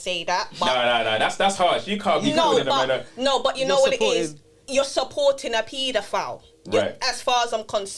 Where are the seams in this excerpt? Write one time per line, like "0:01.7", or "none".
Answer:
none